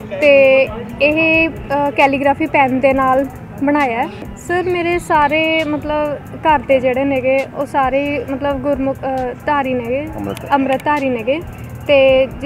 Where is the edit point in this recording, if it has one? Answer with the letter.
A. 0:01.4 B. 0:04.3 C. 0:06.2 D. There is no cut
B